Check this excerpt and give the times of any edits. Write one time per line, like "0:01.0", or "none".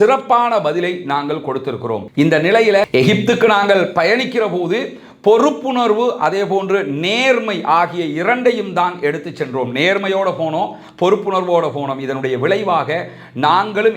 none